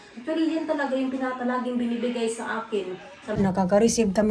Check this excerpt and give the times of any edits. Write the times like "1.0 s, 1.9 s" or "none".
3.4 s